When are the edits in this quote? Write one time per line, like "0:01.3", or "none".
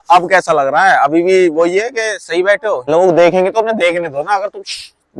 0:02.8

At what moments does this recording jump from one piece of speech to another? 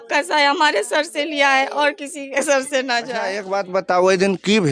0:03.4

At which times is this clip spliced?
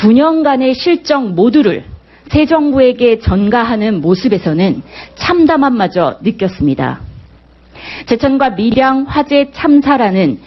0:04.0

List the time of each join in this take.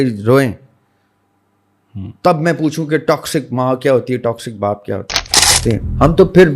0:05.6

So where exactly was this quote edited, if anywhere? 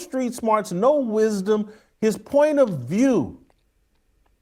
none

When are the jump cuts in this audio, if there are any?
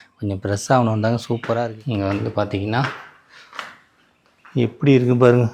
0:01.8

